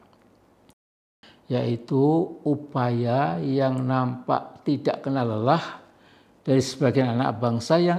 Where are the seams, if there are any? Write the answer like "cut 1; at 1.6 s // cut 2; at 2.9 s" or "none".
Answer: cut 1; at 1.2 s

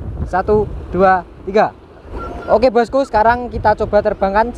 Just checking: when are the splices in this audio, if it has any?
cut 1; at 2.3 s

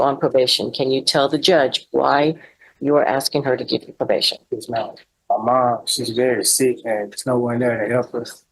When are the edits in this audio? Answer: cut 1; at 5.1 s

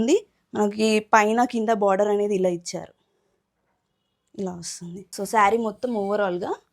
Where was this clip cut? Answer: cut 1; at 5.1 s

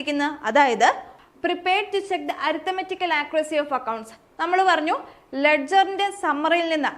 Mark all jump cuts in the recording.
cut 1; at 1.1 s

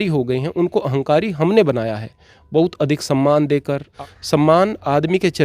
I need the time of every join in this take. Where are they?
cut 1; at 3.8 s

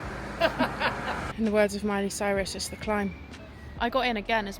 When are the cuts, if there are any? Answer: cut 1; at 1.3 s // cut 2; at 3.7 s

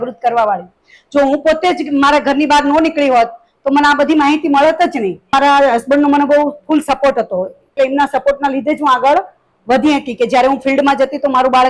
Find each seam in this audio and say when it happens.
cut 1; at 5.3 s // cut 2; at 7.7 s

